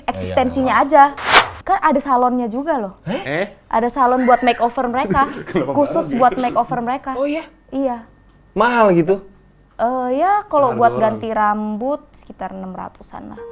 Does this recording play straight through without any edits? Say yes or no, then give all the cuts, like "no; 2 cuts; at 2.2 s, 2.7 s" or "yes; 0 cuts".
no; 1 cut; at 1.3 s